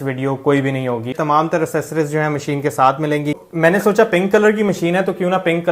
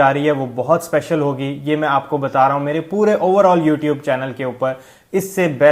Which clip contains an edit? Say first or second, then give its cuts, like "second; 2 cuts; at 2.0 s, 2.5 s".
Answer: first; 2 cuts; at 1.2 s, 3.4 s